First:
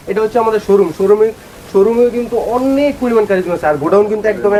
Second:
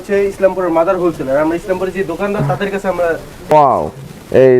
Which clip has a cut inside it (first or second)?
second